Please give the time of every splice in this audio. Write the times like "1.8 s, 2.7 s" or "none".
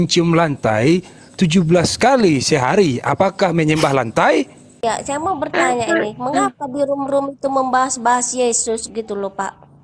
4.8 s